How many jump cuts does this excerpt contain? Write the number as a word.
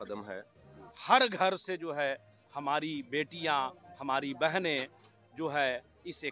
one